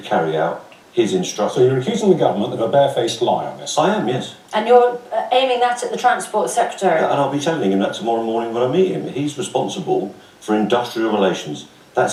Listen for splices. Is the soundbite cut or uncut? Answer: uncut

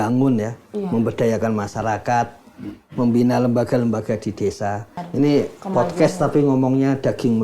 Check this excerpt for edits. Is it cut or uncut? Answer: cut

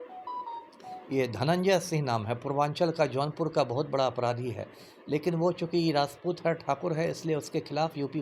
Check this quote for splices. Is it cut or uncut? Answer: uncut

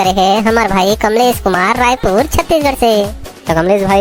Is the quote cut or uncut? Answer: uncut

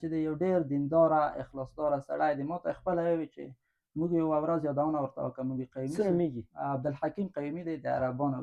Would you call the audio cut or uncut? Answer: uncut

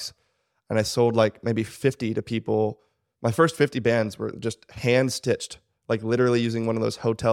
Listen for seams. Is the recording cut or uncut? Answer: uncut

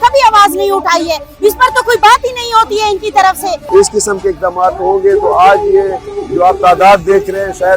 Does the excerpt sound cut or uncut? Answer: cut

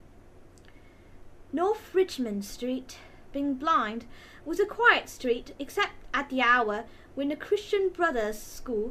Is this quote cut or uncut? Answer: uncut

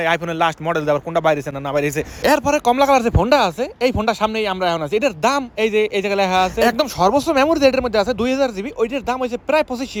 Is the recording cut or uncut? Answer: uncut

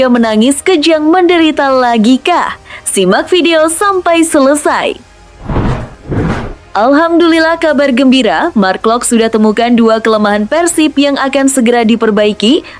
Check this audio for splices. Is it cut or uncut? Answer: cut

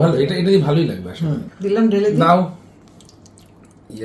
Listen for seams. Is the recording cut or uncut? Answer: cut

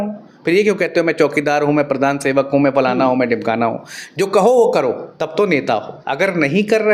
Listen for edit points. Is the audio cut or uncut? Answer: cut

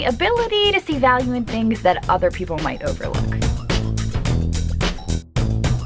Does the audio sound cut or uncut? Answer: uncut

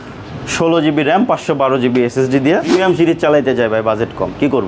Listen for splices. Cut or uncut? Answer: cut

